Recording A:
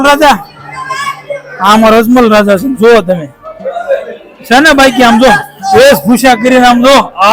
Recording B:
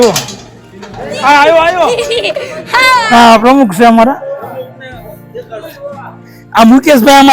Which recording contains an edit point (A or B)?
B